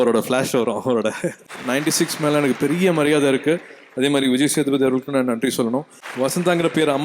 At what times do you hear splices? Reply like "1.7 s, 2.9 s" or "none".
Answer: 1.5 s, 6.0 s